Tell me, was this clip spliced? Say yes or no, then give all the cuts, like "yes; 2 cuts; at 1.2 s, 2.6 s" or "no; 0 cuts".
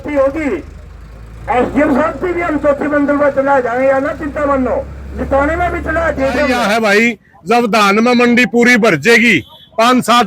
yes; 1 cut; at 6.6 s